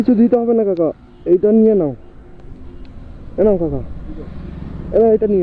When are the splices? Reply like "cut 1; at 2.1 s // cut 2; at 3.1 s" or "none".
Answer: none

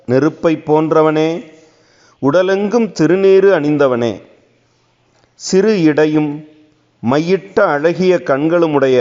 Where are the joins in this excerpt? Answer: none

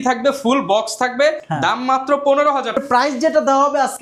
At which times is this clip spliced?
cut 1; at 2.8 s

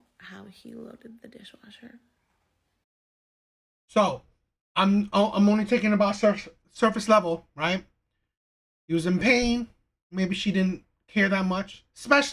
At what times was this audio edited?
none

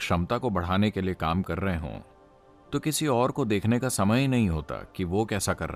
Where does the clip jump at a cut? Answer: none

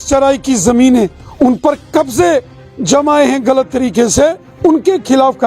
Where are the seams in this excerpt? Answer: cut 1; at 1.2 s // cut 2; at 4.5 s

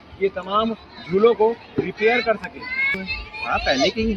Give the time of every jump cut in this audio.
cut 1; at 3.1 s

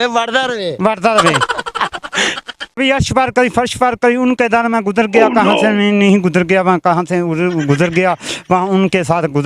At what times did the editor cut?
cut 1; at 2.8 s

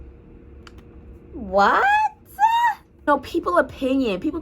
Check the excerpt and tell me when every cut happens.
cut 1; at 3.1 s

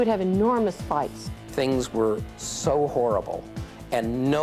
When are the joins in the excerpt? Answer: cut 1; at 1.2 s

